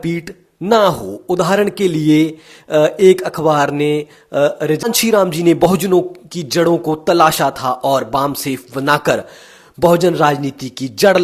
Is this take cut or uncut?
cut